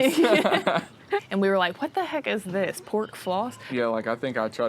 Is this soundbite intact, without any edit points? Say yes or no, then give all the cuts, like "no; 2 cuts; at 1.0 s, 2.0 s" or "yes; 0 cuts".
no; 2 cuts; at 1.2 s, 3.7 s